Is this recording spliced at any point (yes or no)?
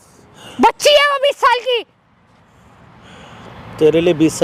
no